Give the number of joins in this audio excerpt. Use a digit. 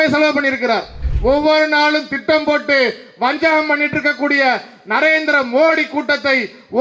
1